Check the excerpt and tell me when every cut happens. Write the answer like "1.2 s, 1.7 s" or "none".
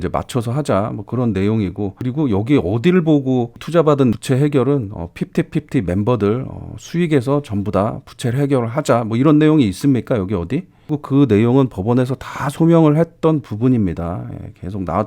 4.1 s